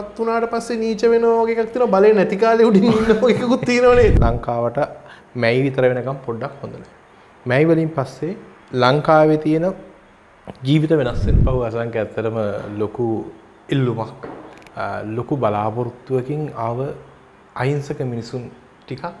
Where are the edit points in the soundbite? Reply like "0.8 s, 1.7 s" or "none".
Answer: 4.2 s, 11.3 s